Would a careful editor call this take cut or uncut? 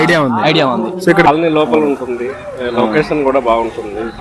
cut